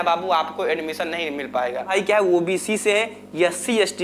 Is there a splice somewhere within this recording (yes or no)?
yes